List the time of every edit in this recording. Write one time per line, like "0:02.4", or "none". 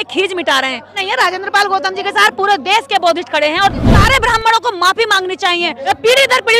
0:01.0
0:03.9
0:05.8